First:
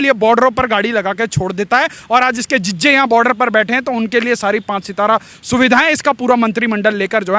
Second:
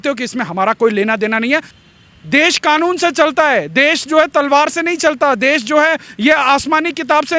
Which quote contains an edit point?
second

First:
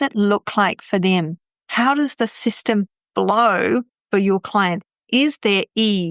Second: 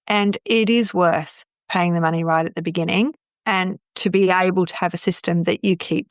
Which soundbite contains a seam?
second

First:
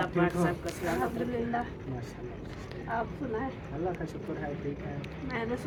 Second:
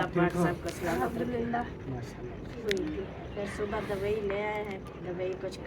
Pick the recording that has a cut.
second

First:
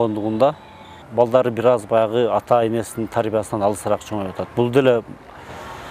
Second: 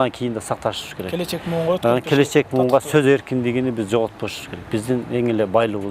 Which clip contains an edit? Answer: first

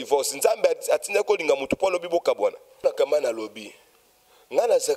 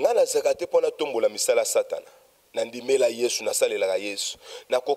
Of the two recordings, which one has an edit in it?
first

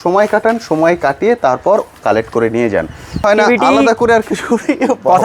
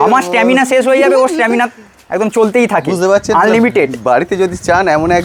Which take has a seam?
first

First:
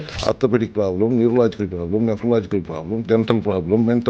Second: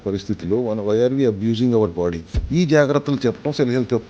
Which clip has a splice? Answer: second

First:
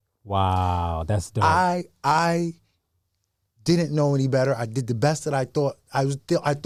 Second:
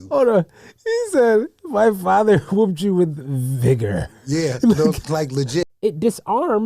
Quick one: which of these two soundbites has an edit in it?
second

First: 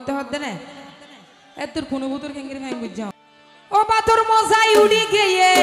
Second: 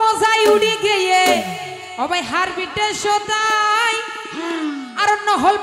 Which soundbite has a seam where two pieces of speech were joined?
first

